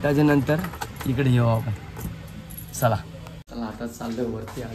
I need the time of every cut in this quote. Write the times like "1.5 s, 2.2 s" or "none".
3.3 s